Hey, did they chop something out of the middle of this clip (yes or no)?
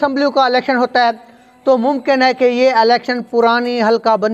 no